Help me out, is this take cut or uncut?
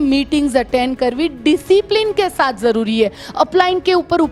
uncut